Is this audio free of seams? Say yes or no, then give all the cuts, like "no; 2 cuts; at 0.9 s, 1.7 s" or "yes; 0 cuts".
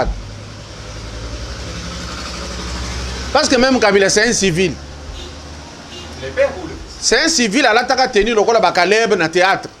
yes; 0 cuts